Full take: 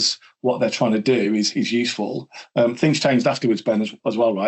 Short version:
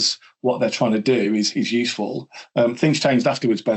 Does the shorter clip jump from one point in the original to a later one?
no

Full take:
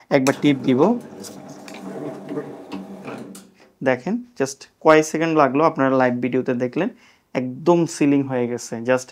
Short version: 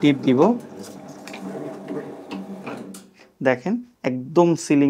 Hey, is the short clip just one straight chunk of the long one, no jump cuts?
no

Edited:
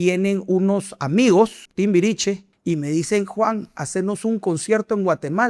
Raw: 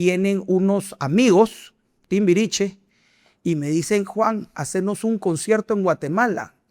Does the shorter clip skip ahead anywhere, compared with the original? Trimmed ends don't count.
yes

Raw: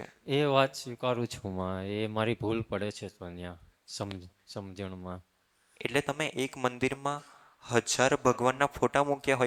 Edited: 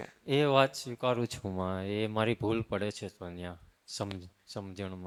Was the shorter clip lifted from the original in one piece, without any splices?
yes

